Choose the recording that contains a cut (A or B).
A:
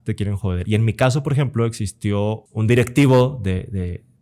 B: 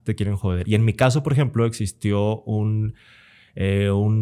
A